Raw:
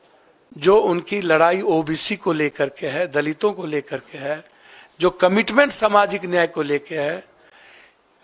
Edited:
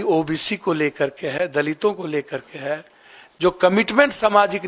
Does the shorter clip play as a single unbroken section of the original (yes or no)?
yes